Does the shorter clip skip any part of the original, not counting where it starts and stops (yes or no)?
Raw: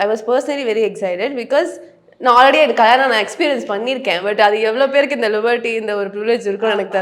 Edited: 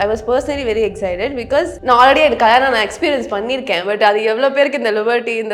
yes